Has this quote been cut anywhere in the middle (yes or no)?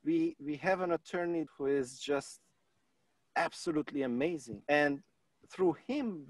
yes